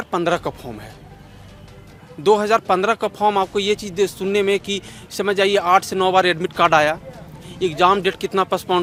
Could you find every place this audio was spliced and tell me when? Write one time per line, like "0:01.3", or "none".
none